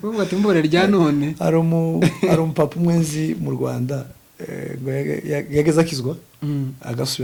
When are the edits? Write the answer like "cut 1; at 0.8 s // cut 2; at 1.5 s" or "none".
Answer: none